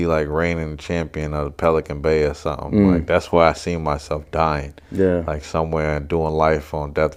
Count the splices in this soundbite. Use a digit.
0